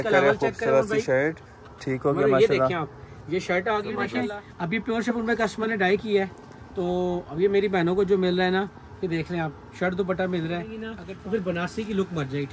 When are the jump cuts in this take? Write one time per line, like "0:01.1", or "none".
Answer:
0:04.2
0:10.9